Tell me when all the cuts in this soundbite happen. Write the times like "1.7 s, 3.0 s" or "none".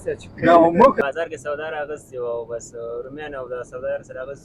1.0 s